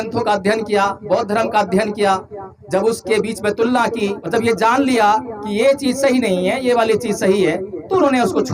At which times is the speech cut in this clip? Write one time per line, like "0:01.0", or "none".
0:04.2